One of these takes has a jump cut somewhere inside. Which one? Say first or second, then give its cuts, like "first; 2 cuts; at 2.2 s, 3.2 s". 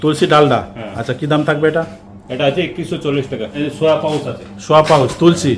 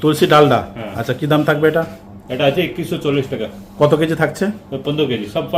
first; 1 cut; at 3.6 s